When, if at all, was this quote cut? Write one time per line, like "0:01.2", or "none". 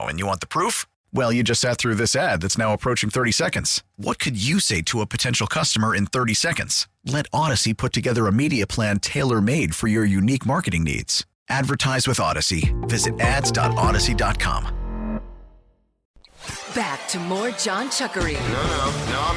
0:16.1

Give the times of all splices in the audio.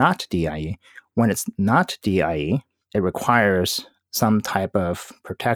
none

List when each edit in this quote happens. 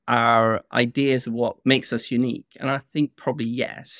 0:01.6

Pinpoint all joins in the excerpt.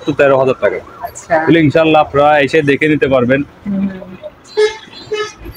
none

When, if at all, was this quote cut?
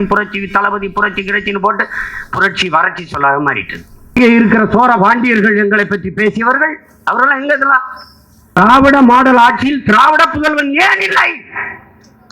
0:04.1
0:08.6

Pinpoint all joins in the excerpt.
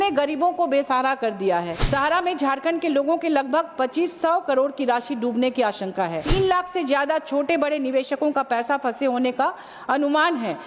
0:01.8
0:06.3

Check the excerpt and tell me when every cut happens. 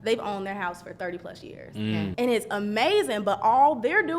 0:02.1

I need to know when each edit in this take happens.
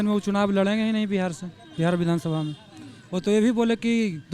none

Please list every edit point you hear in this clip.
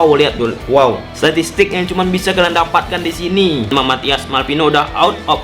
0:03.7

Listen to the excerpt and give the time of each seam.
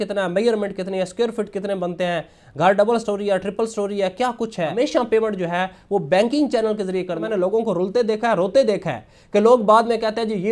0:04.7
0:07.2

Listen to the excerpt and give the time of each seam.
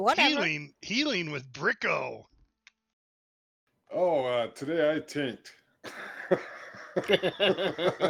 0:02.4

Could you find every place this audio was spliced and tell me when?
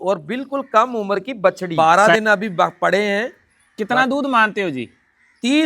0:01.6

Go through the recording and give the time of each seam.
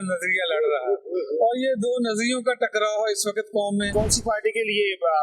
0:03.9

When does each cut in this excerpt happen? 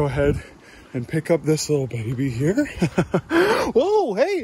none

